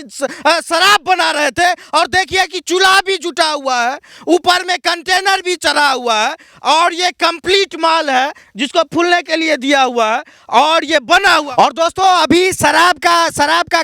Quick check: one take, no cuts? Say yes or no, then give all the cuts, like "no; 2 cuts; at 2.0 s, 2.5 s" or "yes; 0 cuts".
no; 1 cut; at 11.5 s